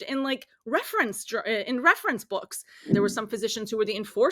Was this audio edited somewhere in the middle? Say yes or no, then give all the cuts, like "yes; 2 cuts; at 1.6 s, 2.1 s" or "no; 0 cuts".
yes; 1 cut; at 2.9 s